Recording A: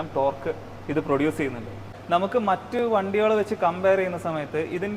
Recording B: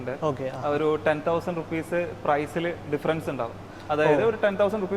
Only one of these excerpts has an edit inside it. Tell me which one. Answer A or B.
A